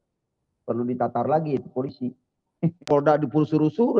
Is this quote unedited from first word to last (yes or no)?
no